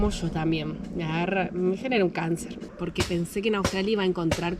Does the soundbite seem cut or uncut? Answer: cut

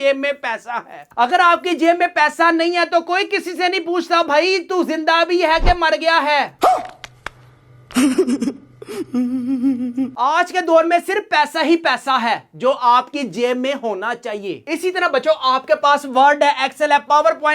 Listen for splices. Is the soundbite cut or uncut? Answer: uncut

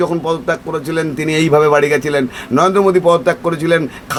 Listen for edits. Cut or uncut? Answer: uncut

